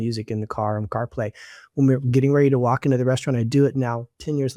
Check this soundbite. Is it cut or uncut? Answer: uncut